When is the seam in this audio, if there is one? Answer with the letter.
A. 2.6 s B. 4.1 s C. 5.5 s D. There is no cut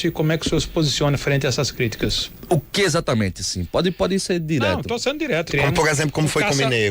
C